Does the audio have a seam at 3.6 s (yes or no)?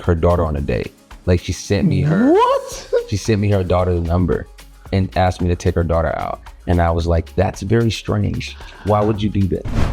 no